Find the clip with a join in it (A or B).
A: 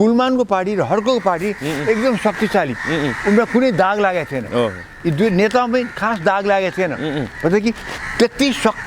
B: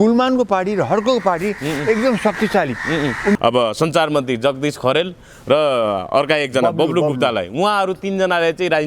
B